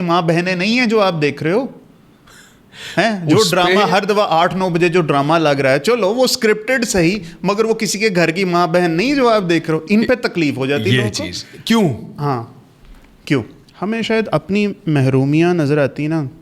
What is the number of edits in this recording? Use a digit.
1